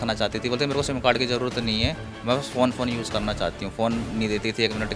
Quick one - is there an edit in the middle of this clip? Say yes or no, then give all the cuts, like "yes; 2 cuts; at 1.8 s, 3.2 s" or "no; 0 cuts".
no; 0 cuts